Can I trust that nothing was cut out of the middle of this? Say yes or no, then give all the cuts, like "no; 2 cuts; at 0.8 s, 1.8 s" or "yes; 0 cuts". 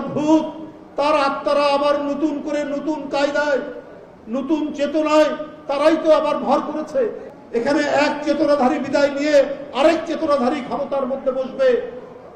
no; 1 cut; at 7.2 s